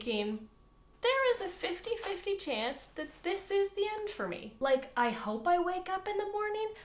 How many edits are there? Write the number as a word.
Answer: one